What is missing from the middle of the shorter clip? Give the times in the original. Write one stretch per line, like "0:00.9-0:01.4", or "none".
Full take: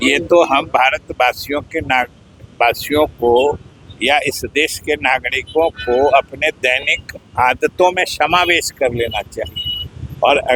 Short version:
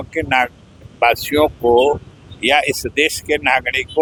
none